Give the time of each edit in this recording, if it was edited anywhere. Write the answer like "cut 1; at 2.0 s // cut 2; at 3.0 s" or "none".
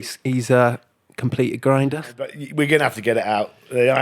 cut 1; at 2.2 s